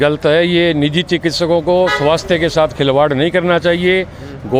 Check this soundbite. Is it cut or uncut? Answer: uncut